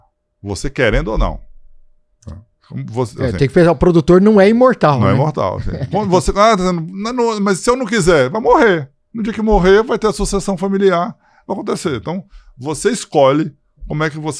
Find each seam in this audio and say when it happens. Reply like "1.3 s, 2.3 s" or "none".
none